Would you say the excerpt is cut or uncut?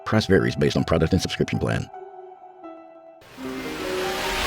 cut